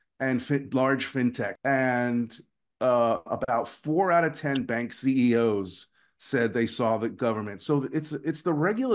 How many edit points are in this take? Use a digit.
1